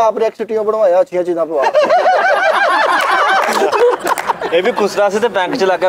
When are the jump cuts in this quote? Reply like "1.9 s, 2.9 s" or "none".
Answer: 4.4 s